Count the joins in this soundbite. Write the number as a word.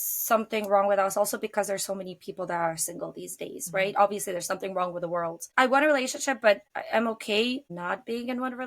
three